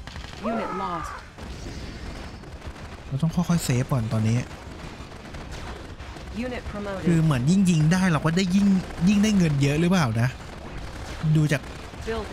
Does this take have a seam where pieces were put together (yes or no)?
yes